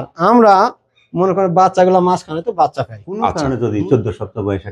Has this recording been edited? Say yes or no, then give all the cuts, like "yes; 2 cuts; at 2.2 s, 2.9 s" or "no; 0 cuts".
yes; 1 cut; at 3.4 s